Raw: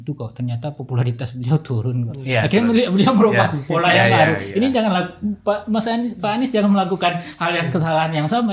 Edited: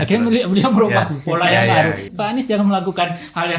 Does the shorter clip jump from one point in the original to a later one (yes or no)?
yes